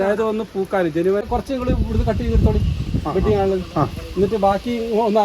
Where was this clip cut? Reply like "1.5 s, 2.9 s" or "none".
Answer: 1.2 s